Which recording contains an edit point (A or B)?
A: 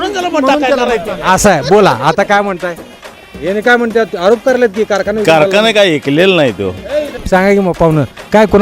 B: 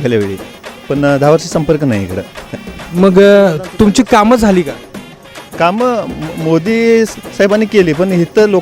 A